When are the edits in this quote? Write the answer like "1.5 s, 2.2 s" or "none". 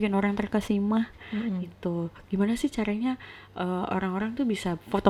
none